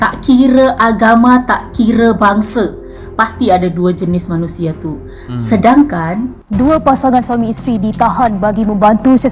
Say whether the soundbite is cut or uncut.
cut